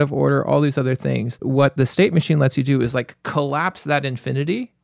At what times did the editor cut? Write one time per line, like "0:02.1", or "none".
0:01.4